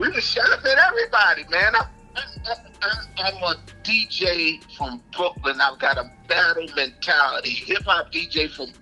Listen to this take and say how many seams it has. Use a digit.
0